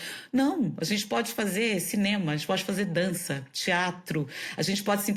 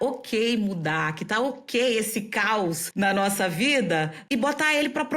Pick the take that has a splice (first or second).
second